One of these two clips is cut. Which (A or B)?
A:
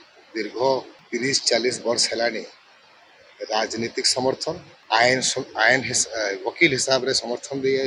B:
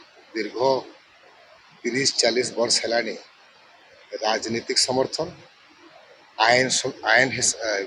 A